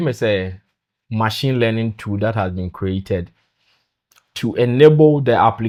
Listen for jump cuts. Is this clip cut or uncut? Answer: uncut